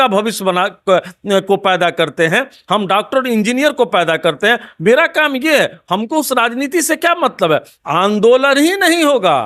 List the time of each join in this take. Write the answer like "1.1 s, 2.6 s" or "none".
7.7 s